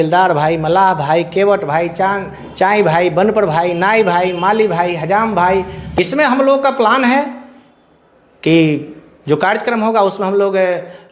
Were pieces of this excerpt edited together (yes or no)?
yes